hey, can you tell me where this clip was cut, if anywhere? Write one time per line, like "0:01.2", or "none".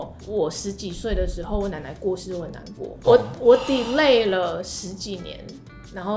0:02.9